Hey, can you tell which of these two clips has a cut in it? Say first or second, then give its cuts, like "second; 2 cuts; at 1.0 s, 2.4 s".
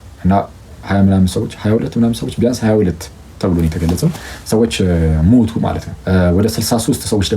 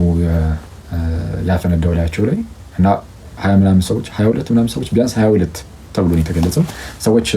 first; 1 cut; at 5.9 s